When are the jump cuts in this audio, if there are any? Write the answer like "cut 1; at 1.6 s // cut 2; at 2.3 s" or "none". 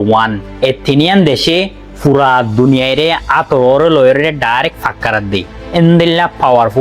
none